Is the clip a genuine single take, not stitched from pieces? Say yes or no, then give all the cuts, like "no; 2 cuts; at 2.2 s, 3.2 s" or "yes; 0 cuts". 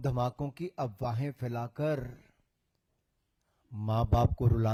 yes; 0 cuts